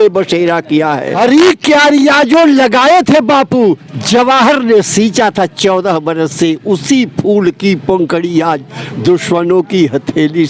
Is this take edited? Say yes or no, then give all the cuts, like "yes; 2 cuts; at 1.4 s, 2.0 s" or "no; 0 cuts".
yes; 1 cut; at 1.2 s